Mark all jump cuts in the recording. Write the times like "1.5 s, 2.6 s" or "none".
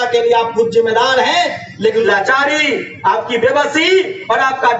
2.0 s